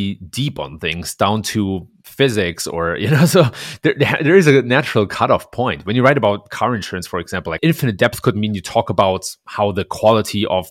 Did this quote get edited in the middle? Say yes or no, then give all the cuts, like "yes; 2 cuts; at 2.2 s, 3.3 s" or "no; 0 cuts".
no; 0 cuts